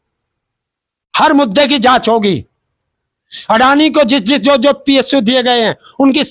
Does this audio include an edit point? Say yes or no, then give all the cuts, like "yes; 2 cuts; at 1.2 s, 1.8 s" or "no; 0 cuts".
no; 0 cuts